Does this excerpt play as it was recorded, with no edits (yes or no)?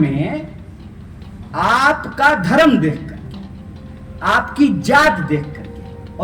yes